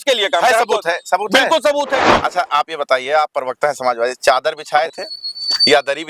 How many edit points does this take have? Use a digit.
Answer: 1